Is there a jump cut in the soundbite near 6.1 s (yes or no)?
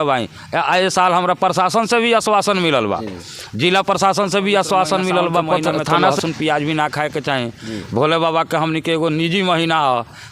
yes